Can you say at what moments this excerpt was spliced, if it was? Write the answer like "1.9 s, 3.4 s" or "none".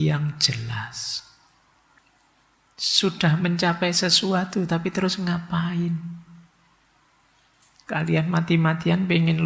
2.0 s